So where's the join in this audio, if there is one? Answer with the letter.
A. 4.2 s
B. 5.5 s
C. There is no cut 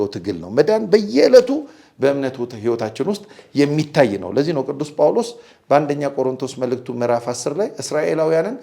C